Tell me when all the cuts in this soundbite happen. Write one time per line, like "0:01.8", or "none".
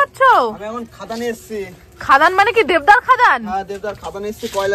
none